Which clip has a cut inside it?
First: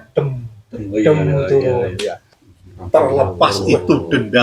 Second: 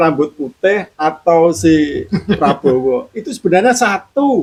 first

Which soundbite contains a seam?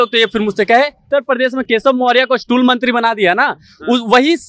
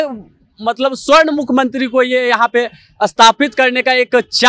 first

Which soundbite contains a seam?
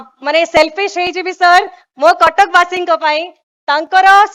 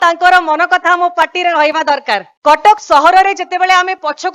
second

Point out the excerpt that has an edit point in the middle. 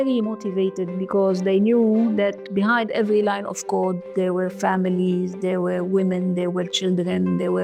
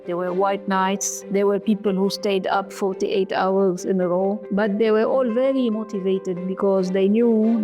second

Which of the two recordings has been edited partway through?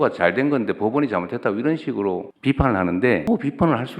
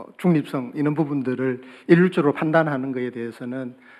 first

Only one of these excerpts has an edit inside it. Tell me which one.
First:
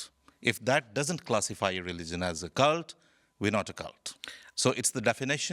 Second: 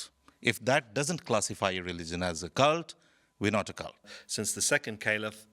second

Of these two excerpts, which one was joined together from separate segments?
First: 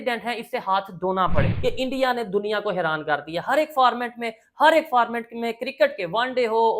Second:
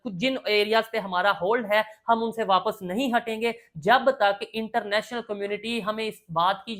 first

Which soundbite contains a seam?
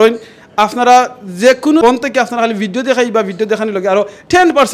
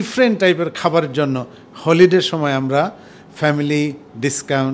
first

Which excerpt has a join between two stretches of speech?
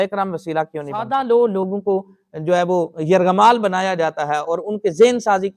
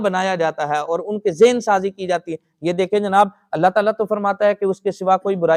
first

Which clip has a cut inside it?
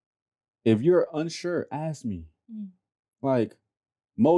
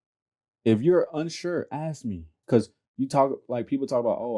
second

